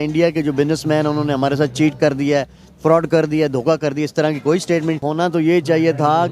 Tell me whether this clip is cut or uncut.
cut